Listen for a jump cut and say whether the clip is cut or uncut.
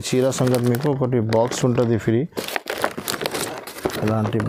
uncut